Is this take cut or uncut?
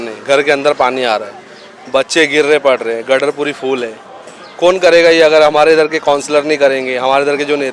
uncut